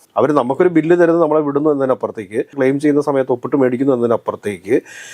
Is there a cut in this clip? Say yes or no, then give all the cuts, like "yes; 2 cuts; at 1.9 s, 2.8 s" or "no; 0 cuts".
no; 0 cuts